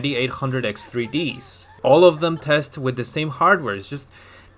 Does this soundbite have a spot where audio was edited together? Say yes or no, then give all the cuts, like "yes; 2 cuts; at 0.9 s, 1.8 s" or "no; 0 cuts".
yes; 1 cut; at 1.7 s